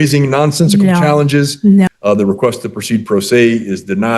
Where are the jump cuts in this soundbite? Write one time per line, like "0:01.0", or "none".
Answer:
0:01.9